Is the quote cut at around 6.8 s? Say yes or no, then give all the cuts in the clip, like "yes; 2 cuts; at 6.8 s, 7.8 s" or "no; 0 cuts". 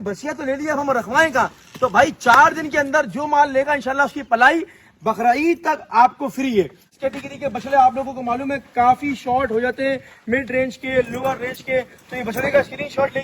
yes; 1 cut; at 6.8 s